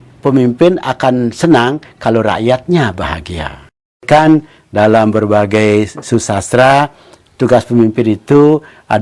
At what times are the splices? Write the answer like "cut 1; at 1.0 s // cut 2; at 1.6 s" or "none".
cut 1; at 4.0 s